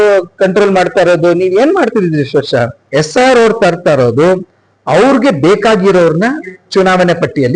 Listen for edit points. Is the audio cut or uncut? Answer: cut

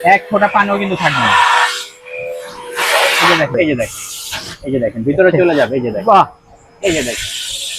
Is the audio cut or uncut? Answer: cut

